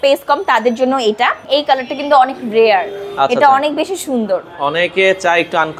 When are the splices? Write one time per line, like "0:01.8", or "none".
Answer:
0:01.4